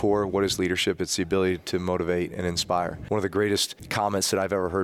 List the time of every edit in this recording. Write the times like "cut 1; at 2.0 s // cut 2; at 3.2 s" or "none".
cut 1; at 3.0 s // cut 2; at 3.8 s